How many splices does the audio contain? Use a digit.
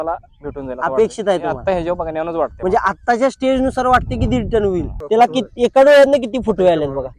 1